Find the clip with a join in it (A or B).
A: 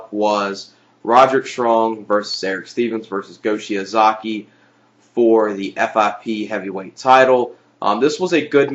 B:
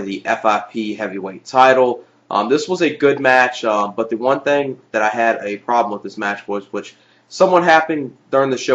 B